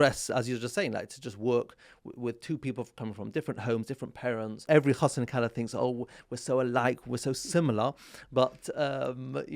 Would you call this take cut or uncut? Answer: cut